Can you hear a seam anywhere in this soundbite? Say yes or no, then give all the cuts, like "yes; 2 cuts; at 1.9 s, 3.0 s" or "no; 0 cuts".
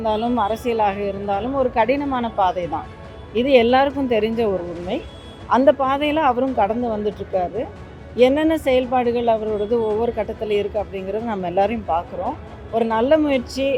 no; 0 cuts